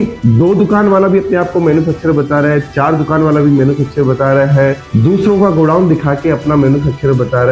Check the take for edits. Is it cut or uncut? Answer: uncut